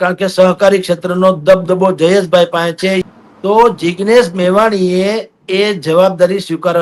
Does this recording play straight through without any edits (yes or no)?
no